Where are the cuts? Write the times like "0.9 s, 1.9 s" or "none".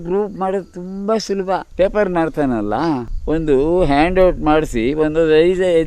1.7 s, 3.1 s